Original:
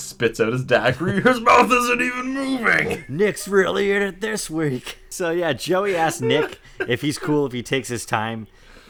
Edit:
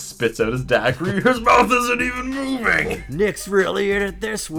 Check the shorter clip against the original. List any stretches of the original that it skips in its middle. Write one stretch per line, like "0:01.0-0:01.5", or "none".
none